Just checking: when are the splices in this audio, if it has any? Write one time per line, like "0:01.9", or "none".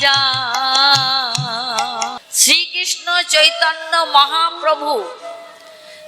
0:02.3